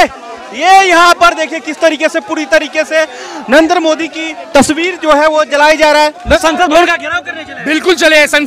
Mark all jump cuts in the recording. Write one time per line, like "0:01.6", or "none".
0:06.4

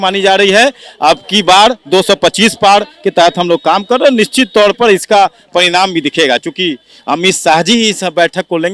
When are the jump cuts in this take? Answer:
none

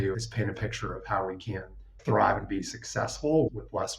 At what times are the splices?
0:02.0

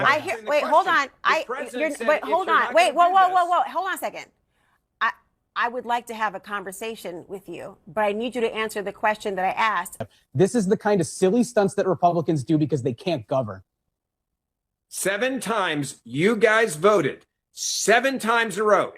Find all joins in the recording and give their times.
0:10.1

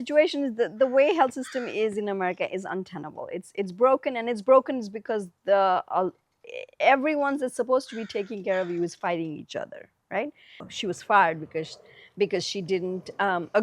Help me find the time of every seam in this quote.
0:10.7

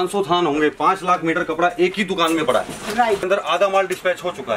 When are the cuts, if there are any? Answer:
0:03.2

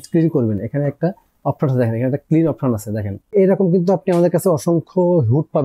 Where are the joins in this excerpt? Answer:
0:03.3

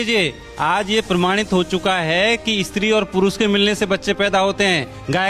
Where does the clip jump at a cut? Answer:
none

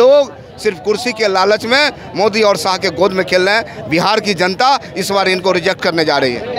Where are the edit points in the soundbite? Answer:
none

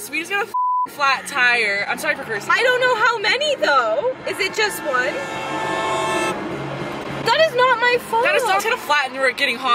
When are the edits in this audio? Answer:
none

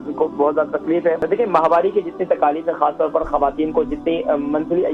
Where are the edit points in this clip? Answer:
0:01.3

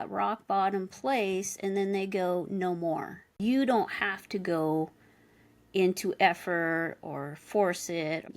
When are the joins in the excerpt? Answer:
0:03.2

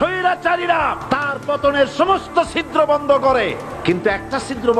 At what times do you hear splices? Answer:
0:01.0
0:03.7

